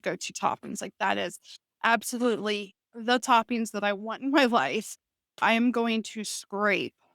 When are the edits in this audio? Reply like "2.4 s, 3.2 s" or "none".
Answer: 5.4 s